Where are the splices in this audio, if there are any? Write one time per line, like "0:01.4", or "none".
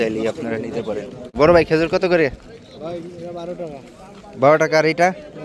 0:01.3